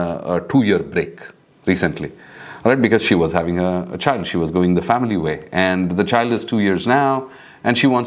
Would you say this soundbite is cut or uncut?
uncut